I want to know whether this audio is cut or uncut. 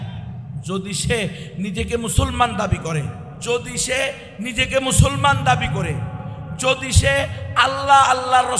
cut